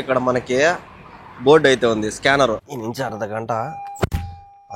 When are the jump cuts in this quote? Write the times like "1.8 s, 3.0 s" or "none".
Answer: 2.7 s